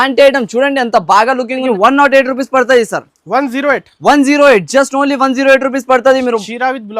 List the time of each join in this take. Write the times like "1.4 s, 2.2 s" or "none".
1.6 s